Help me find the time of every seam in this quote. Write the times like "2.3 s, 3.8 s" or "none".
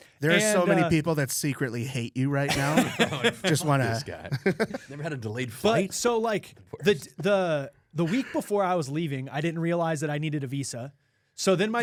none